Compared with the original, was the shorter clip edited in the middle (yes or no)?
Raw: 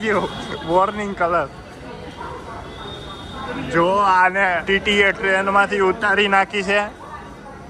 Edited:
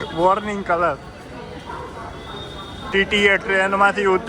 yes